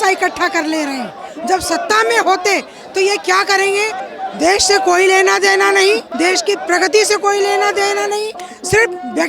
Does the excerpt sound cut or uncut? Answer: cut